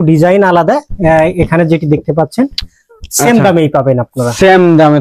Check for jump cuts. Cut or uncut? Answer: uncut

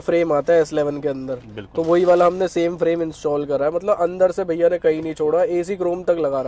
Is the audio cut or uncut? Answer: uncut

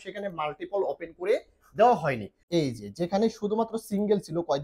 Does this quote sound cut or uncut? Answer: cut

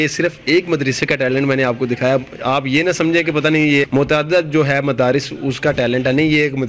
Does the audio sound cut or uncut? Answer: cut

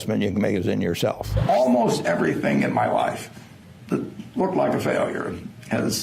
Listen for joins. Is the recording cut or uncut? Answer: cut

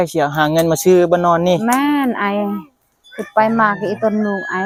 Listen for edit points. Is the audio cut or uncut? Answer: uncut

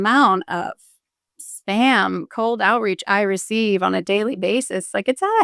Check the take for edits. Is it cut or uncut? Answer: uncut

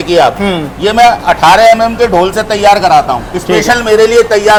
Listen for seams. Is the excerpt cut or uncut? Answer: uncut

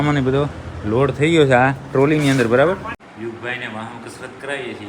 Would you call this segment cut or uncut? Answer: cut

